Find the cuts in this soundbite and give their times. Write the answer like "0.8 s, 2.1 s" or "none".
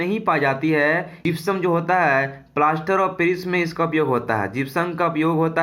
1.1 s